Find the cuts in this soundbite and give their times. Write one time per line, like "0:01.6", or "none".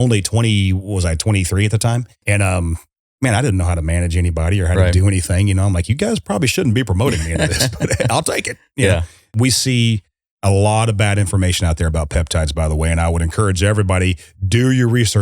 0:02.2
0:09.3